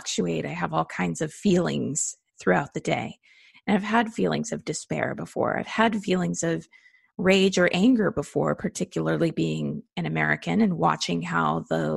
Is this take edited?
no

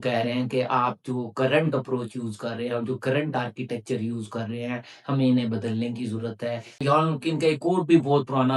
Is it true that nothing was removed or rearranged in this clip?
no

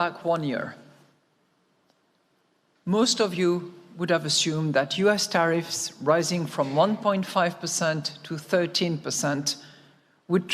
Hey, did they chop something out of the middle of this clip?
no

